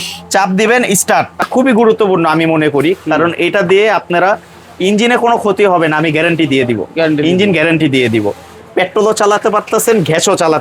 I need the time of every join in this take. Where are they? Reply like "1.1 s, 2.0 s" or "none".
1.4 s